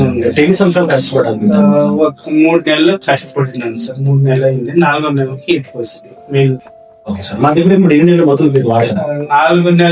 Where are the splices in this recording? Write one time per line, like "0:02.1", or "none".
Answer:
0:06.7